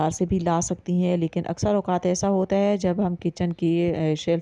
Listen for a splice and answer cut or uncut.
uncut